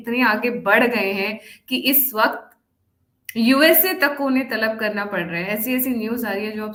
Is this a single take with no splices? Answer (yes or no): yes